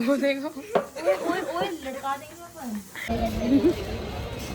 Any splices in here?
yes; 1 cut; at 3.1 s

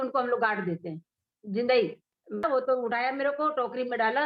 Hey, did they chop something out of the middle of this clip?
yes; 1 cut; at 2.4 s

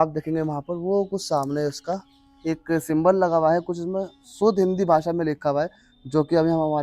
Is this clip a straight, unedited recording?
yes; 0 cuts

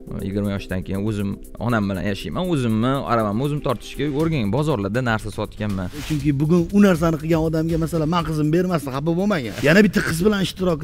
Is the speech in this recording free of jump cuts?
no; 2 cuts; at 6.0 s, 9.5 s

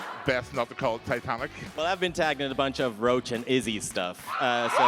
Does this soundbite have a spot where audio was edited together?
yes; 1 cut; at 1.6 s

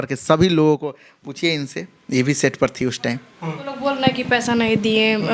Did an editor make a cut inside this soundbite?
yes; 1 cut; at 3.7 s

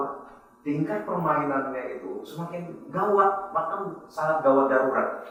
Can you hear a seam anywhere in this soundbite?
no; 0 cuts

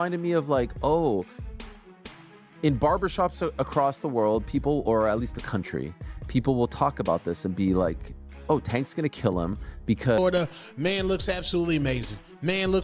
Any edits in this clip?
yes; 1 cut; at 10.2 s

